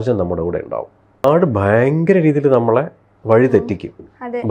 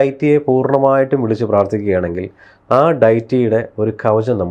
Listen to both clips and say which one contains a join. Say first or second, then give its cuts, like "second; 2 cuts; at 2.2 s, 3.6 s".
first; 1 cut; at 1.2 s